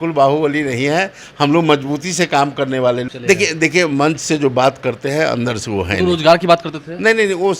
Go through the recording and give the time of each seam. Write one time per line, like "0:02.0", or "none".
0:03.0